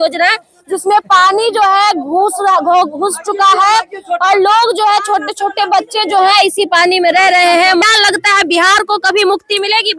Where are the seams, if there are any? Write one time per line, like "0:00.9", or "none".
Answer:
0:07.8